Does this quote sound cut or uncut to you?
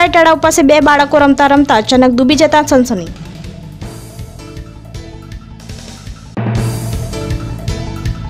uncut